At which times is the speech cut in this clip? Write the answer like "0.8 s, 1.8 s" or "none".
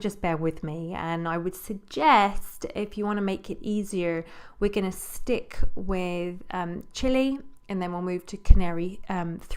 8.3 s